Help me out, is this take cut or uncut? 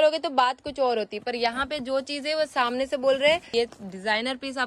cut